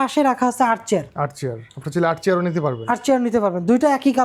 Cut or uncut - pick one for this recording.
uncut